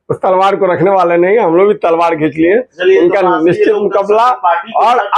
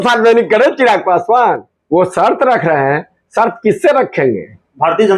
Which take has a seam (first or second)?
second